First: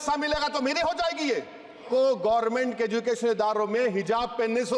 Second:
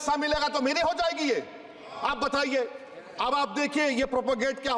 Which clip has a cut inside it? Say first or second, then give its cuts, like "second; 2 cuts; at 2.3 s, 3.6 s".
first; 1 cut; at 1.9 s